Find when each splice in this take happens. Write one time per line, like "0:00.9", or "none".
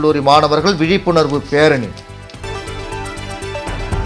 none